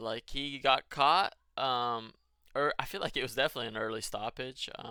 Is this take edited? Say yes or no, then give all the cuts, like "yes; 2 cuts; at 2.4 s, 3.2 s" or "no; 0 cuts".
no; 0 cuts